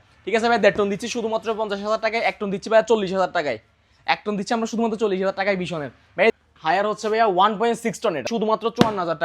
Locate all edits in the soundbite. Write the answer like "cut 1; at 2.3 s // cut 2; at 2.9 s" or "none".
cut 1; at 6.3 s // cut 2; at 8.3 s